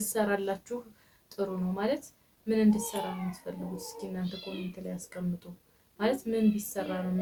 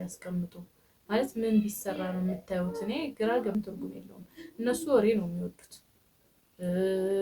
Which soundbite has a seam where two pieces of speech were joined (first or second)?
second